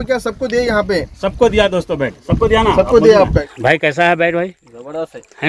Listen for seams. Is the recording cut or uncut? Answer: cut